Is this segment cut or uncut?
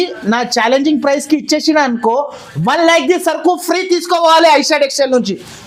uncut